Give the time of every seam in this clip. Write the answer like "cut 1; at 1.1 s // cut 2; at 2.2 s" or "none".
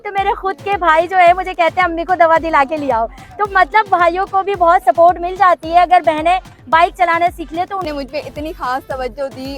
cut 1; at 7.9 s